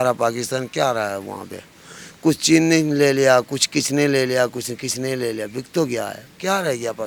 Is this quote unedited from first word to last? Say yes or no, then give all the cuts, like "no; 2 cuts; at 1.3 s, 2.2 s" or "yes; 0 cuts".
yes; 0 cuts